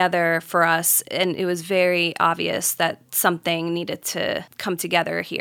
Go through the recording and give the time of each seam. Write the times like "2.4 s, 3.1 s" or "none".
4.5 s